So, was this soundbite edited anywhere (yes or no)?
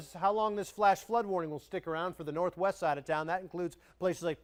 no